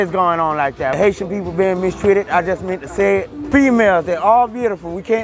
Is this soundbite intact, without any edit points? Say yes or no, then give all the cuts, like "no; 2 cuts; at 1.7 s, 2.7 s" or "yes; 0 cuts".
no; 2 cuts; at 1.0 s, 3.5 s